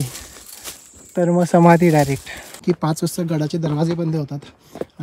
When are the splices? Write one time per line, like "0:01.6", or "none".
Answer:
0:02.6